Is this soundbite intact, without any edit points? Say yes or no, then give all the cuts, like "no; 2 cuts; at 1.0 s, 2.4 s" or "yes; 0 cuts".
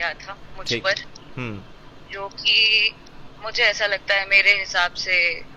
yes; 0 cuts